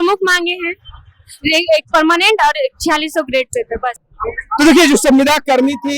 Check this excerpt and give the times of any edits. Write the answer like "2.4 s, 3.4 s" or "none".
none